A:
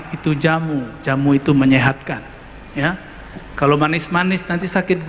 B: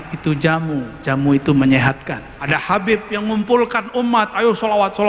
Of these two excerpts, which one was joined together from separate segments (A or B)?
B